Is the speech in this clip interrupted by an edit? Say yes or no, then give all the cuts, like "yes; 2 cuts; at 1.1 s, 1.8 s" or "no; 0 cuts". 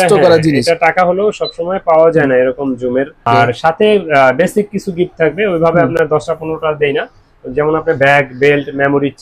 yes; 1 cut; at 3.2 s